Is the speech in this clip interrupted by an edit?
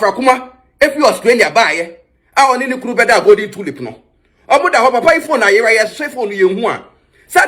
no; 0 cuts

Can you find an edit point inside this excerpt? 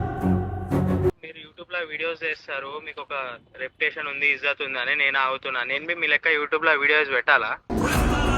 yes; 1 cut; at 1.2 s

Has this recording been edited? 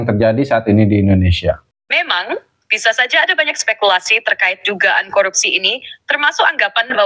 no; 0 cuts

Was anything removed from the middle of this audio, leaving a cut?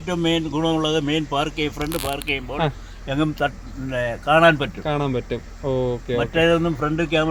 no; 0 cuts

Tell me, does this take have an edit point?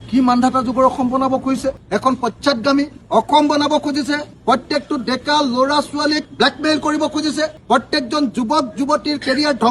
yes; 2 cuts; at 1.8 s, 3.0 s

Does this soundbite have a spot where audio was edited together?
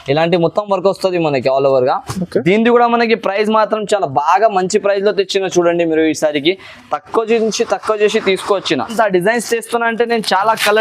yes; 1 cut; at 8.9 s

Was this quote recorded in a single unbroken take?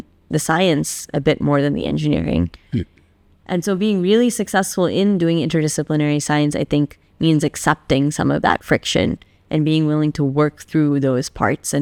yes; 0 cuts

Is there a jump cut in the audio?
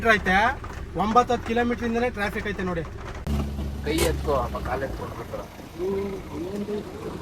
no; 0 cuts

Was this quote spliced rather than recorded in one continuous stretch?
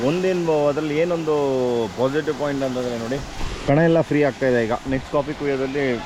no; 0 cuts

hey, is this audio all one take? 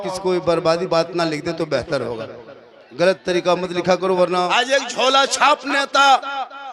no; 1 cut; at 4.5 s

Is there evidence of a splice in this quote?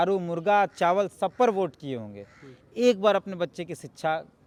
no; 0 cuts

